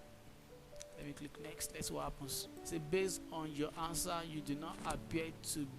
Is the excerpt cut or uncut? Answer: cut